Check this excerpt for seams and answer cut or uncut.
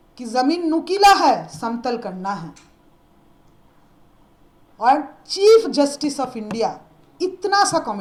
uncut